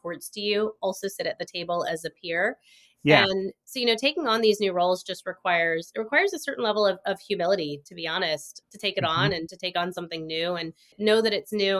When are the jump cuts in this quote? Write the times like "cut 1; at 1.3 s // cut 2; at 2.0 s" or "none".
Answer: cut 1; at 8.6 s // cut 2; at 10.9 s